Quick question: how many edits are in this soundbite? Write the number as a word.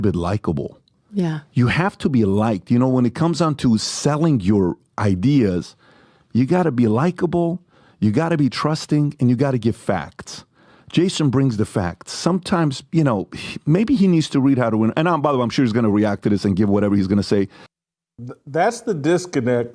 one